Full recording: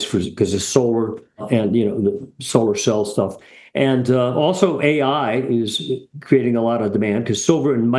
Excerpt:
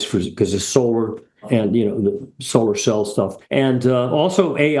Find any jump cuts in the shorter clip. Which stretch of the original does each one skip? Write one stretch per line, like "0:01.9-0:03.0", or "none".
0:03.4-0:03.6